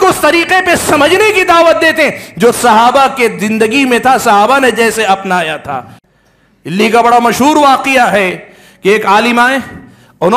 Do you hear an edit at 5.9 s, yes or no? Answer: yes